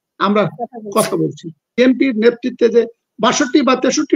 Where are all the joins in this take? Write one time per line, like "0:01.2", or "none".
0:01.7

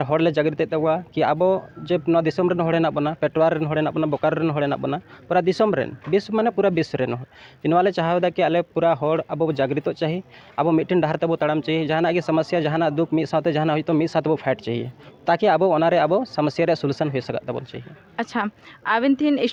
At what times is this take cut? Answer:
none

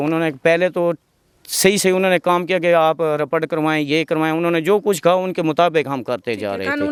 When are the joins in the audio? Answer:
none

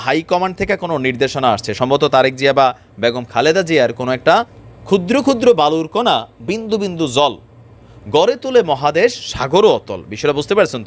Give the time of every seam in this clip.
0:04.6

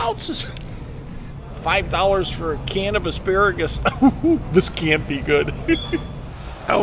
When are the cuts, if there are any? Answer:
0:01.2
0:06.1

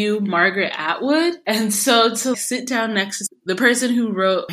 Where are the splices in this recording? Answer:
0:01.4
0:03.2

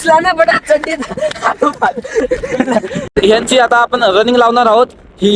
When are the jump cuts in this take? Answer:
0:03.0

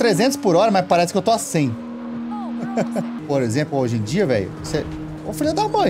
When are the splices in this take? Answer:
0:03.2

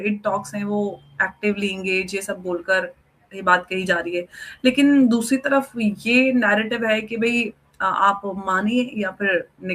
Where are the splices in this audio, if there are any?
none

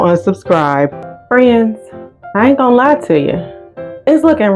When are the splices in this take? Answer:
0:01.1

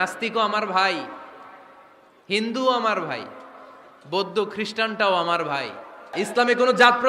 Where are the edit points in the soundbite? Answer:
0:06.1

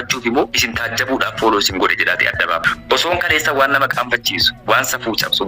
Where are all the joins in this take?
0:02.7

